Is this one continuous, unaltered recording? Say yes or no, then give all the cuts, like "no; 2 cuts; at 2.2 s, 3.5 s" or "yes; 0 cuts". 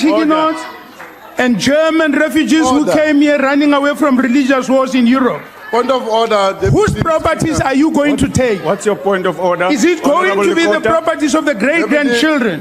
yes; 0 cuts